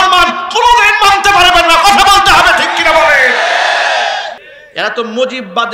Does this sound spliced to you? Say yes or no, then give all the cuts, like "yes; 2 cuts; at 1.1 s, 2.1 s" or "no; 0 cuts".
yes; 1 cut; at 4.3 s